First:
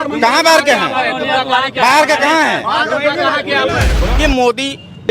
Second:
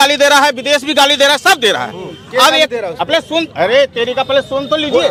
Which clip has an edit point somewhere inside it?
first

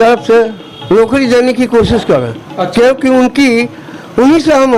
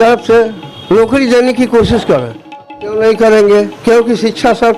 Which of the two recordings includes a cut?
second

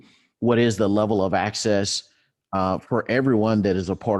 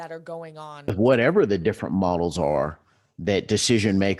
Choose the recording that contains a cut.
second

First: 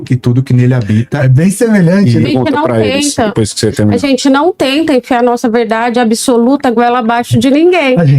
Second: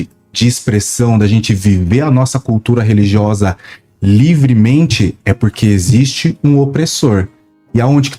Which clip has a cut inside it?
first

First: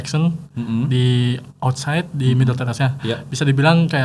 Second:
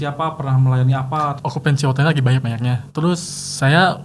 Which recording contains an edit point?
second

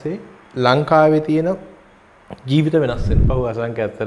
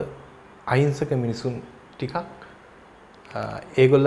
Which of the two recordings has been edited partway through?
first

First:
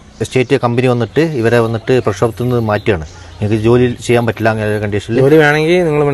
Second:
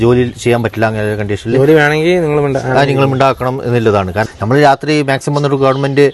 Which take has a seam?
second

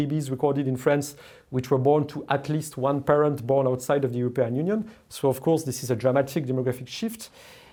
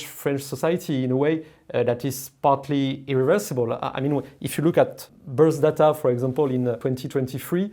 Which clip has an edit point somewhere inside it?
second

